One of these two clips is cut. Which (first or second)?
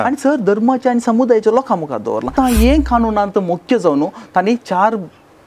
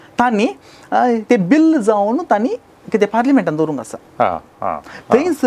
first